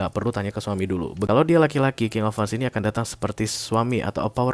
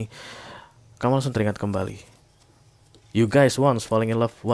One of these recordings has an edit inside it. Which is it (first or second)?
first